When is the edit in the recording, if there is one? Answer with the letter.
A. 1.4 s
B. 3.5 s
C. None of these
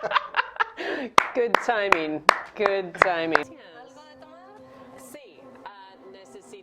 B